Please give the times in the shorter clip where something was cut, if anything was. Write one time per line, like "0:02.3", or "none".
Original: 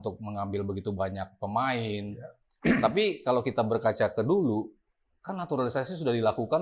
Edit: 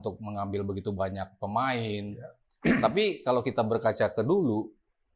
none